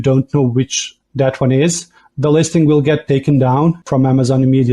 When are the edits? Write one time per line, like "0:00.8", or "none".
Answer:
0:03.8